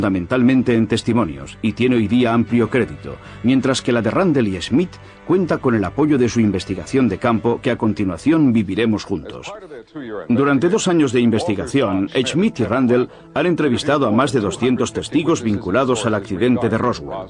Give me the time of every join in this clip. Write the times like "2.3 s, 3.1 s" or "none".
3.1 s